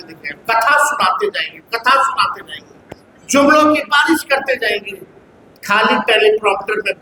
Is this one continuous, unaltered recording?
yes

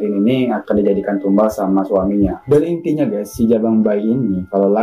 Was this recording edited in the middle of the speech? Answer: yes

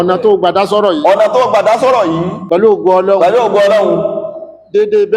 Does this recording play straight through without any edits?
no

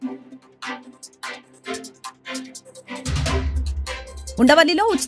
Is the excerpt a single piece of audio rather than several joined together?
yes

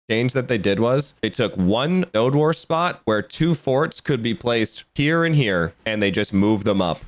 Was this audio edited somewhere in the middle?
no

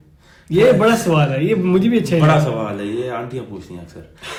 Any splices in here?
no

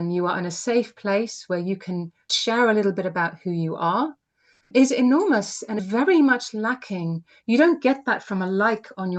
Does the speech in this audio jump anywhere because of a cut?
yes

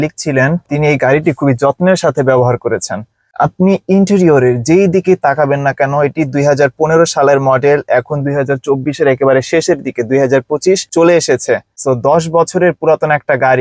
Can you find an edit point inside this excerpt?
no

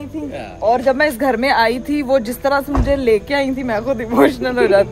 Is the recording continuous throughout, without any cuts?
yes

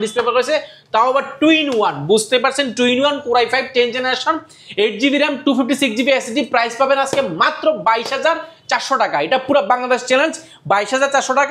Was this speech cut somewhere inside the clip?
no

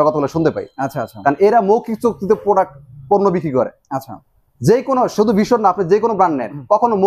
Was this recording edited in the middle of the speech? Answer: no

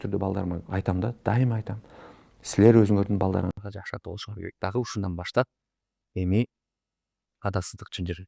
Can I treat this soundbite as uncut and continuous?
yes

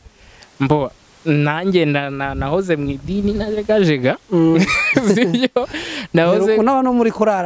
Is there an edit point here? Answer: no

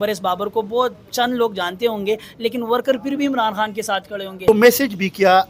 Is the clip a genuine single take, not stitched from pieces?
no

